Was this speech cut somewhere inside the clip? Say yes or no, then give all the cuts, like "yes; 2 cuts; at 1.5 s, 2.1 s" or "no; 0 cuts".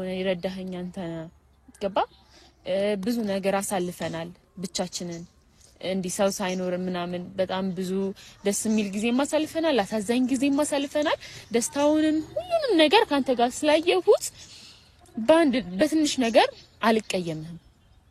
no; 0 cuts